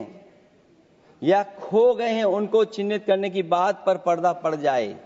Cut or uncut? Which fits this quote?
uncut